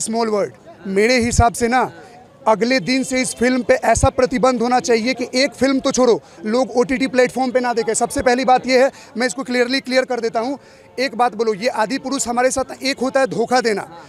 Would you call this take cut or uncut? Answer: uncut